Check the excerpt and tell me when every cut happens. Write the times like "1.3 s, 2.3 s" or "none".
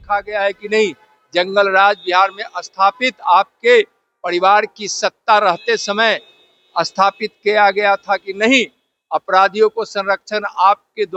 none